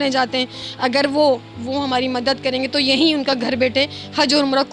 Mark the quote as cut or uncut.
uncut